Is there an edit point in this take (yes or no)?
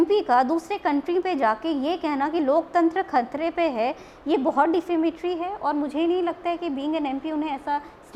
no